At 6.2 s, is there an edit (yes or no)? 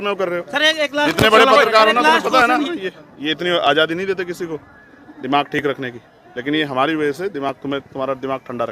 no